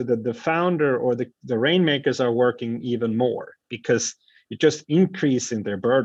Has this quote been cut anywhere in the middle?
no; 0 cuts

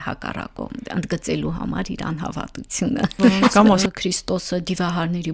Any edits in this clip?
yes; 1 cut; at 3.8 s

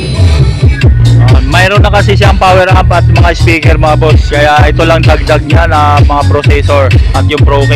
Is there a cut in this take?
yes; 1 cut; at 1.1 s

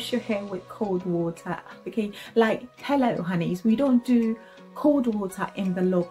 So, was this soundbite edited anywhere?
no; 0 cuts

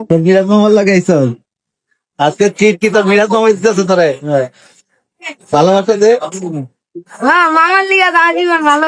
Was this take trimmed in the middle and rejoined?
no; 0 cuts

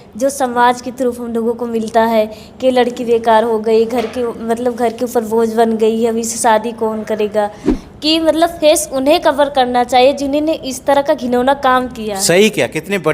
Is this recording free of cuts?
no; 1 cut; at 7.7 s

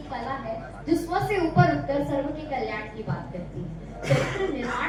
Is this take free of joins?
yes; 0 cuts

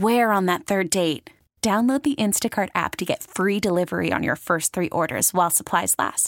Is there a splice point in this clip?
no; 0 cuts

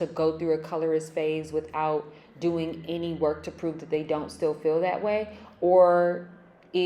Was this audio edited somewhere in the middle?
no; 0 cuts

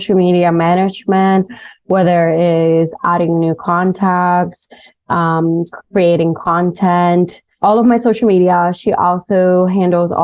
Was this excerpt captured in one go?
yes; 0 cuts

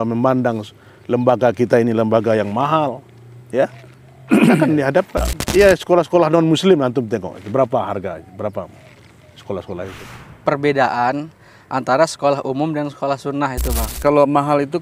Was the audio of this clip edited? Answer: yes; 3 cuts; at 5.4 s, 10.2 s, 13.9 s

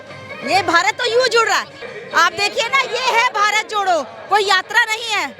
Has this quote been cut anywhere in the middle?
yes; 1 cut; at 1.8 s

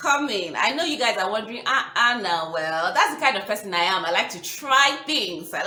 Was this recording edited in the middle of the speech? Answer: no; 0 cuts

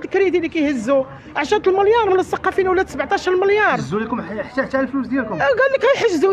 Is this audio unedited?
yes; 0 cuts

